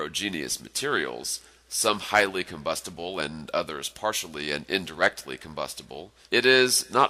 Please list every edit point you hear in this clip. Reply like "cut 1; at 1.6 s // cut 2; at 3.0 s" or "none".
cut 1; at 5.8 s